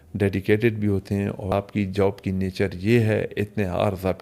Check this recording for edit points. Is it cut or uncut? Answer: cut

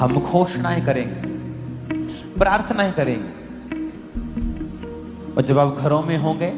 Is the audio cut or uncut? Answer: uncut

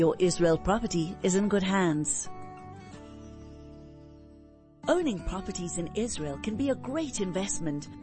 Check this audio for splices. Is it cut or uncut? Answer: uncut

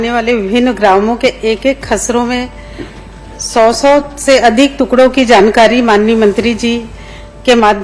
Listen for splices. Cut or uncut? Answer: uncut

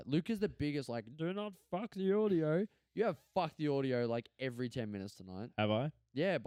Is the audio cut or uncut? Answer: uncut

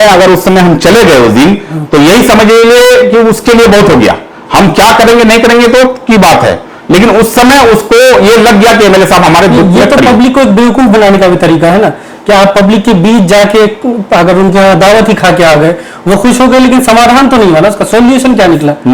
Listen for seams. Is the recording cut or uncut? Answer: uncut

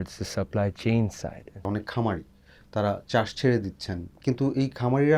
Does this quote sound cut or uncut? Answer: uncut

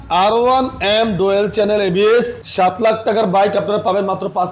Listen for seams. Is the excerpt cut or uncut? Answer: uncut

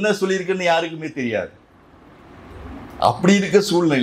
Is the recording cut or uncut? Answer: uncut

